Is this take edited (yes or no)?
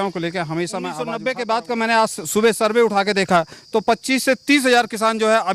yes